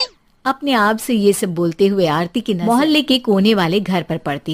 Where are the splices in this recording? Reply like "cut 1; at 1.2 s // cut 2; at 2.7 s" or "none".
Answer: cut 1; at 2.6 s